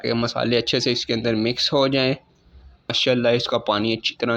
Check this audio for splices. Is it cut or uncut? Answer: cut